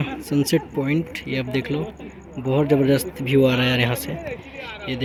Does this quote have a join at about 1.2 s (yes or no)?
no